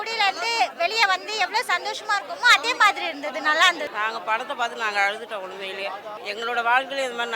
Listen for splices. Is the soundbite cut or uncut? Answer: cut